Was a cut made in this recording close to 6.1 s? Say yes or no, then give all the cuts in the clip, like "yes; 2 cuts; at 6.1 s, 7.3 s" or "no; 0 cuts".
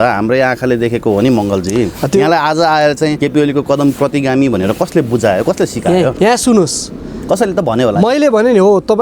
yes; 2 cuts; at 3.2 s, 6.1 s